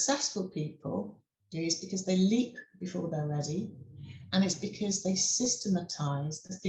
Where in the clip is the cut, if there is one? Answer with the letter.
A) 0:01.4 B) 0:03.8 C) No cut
C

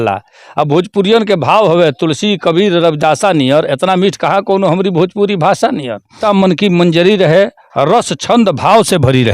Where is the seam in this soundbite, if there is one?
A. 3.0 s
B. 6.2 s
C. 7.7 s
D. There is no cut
B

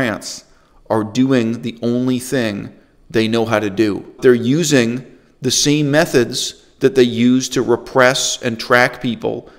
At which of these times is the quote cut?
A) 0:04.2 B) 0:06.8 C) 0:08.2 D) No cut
A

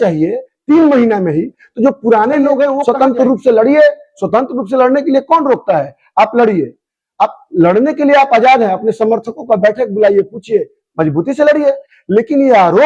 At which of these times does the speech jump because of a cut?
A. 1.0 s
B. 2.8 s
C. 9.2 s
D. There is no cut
B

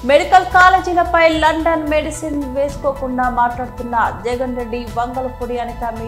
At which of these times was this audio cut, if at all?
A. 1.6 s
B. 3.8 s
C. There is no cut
C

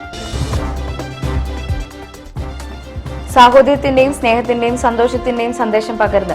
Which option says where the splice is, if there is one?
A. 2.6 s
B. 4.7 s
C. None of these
C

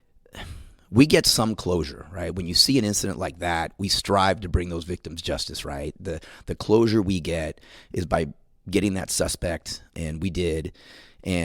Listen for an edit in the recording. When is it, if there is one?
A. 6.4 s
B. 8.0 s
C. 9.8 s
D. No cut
C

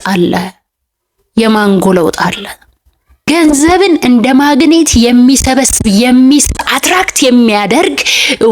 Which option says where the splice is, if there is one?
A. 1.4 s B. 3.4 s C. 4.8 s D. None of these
B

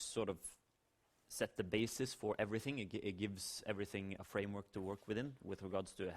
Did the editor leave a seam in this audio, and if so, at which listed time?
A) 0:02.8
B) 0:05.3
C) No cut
A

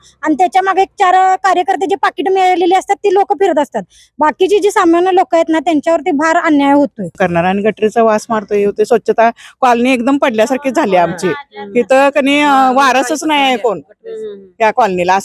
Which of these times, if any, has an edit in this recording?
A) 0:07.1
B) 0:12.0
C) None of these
A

